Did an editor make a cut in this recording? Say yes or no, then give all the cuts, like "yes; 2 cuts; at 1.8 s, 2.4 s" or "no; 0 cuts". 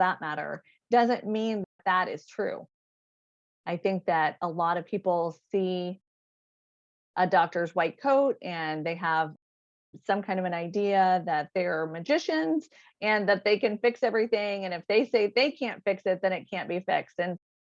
no; 0 cuts